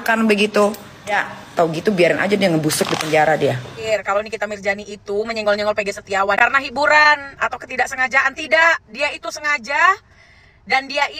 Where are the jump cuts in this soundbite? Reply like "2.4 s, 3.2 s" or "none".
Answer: 1.1 s, 3.9 s